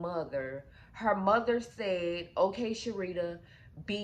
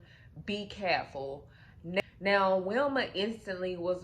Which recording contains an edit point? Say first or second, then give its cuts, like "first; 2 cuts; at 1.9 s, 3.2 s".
second; 1 cut; at 2.0 s